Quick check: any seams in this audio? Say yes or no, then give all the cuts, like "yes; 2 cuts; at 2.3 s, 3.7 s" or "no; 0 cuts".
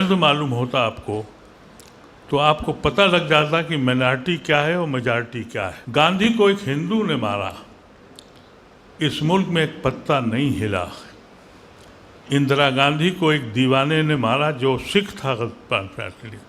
yes; 1 cut; at 5.8 s